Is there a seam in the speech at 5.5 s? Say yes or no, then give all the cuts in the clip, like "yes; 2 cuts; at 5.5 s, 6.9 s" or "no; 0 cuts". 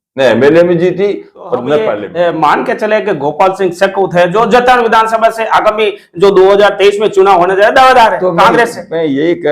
no; 1 cut; at 2.0 s